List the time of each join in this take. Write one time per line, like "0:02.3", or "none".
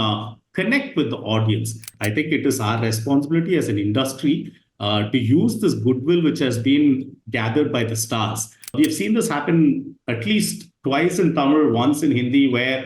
0:01.9
0:08.7